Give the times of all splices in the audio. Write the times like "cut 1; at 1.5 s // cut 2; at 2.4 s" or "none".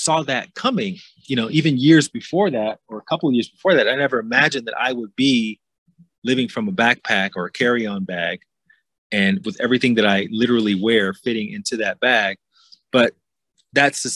none

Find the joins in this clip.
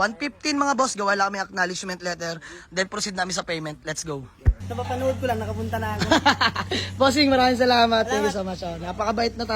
cut 1; at 4.5 s

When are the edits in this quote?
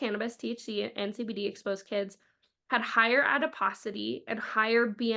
none

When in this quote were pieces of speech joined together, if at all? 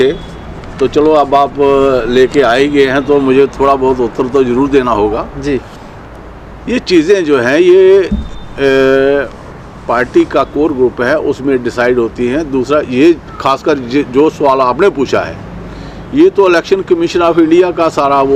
none

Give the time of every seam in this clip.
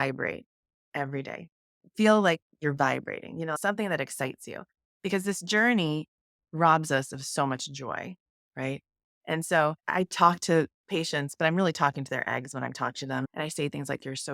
cut 1; at 3.6 s // cut 2; at 9.8 s

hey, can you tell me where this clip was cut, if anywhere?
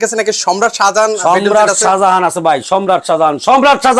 none

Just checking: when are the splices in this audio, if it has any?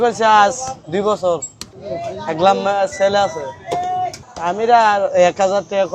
none

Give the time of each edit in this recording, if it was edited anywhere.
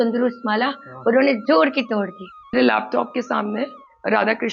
cut 1; at 2.5 s

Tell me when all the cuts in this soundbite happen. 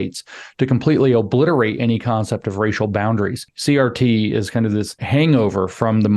cut 1; at 3.5 s // cut 2; at 5.0 s

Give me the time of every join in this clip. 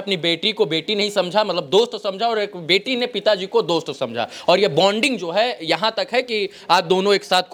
none

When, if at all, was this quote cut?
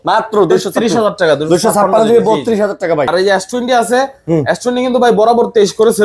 cut 1; at 3.1 s

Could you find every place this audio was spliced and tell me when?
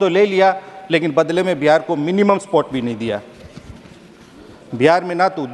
none

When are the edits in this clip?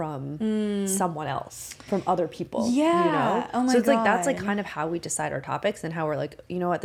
none

